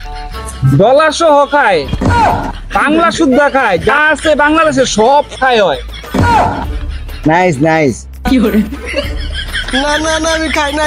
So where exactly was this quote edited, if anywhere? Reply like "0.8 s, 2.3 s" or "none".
none